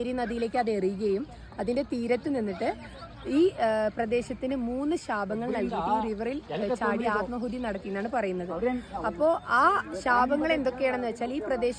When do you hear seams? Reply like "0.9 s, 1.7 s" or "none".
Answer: none

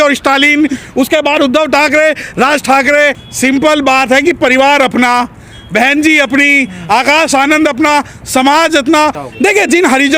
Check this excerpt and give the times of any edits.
3.2 s, 9.2 s

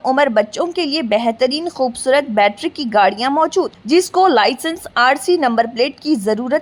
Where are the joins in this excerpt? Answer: none

